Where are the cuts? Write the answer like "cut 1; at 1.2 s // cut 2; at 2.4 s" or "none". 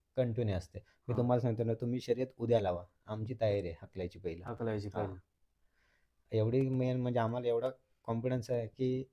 none